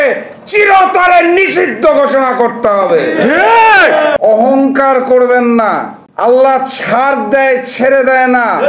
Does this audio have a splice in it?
yes; 1 cut; at 4.2 s

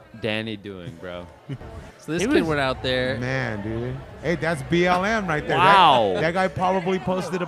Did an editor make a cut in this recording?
no; 0 cuts

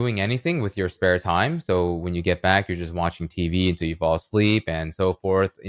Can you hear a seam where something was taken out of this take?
no; 0 cuts

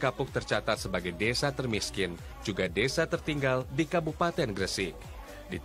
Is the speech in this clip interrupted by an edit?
no; 0 cuts

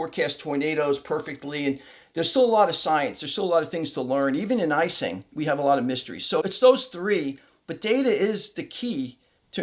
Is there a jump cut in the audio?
no; 0 cuts

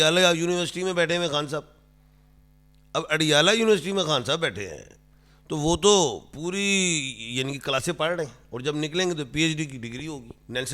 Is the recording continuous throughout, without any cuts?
yes; 0 cuts

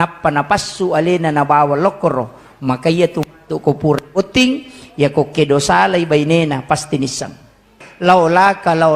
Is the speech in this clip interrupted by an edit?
yes; 1 cut; at 7.8 s

